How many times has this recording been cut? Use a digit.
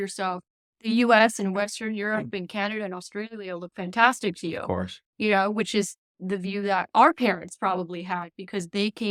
0